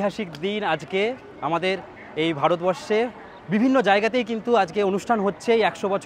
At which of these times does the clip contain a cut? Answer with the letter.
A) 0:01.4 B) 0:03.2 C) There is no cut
C